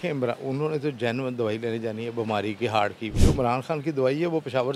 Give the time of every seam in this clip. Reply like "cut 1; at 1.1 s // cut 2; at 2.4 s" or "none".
none